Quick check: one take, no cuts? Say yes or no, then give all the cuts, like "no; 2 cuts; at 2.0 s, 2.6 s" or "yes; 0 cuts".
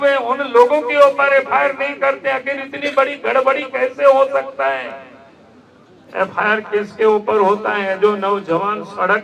yes; 0 cuts